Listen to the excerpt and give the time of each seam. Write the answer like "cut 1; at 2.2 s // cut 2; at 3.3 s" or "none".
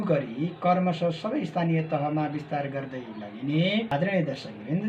cut 1; at 3.9 s